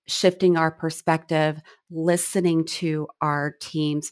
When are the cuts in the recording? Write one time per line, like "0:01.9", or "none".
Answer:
none